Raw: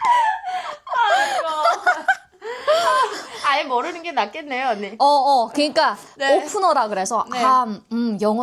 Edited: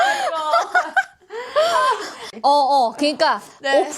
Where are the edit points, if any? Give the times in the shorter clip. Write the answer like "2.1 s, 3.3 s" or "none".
2.3 s